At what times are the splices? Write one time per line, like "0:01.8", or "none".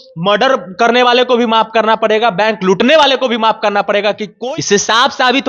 0:04.3